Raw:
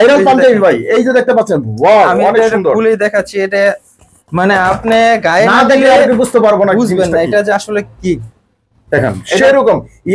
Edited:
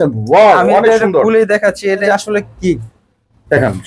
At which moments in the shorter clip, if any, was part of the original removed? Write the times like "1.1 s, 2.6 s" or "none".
2.0 s